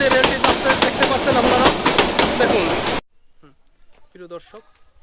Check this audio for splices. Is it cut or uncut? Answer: cut